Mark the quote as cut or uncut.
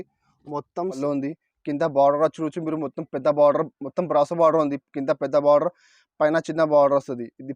cut